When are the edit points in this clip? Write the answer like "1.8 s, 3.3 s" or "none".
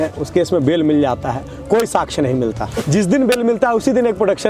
2.7 s